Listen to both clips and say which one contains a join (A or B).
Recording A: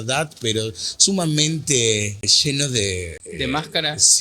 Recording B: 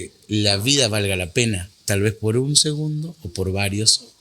A